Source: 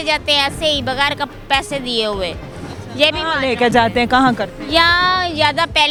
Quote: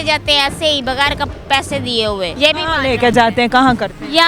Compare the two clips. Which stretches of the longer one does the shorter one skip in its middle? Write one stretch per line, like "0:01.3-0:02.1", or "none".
0:02.3-0:02.9